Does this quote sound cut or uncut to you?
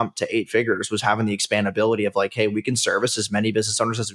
uncut